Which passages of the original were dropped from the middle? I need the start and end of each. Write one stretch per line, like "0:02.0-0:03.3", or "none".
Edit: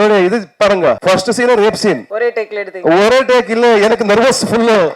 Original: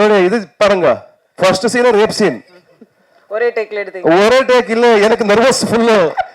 0:01.0-0:01.4
0:02.4-0:03.3